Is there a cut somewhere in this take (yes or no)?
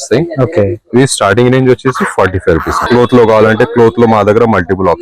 yes